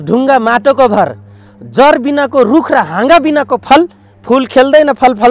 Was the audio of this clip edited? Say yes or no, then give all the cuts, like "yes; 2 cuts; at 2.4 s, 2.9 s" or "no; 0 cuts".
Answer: no; 0 cuts